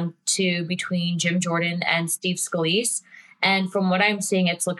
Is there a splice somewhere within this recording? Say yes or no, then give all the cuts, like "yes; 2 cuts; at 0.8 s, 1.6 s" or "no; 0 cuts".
no; 0 cuts